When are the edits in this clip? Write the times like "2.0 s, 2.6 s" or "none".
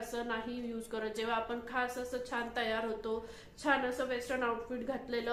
none